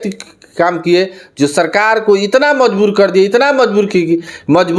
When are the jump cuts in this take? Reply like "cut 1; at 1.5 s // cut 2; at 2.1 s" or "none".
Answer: none